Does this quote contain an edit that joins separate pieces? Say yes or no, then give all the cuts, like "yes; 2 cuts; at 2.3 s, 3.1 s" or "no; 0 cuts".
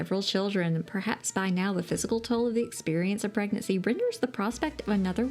no; 0 cuts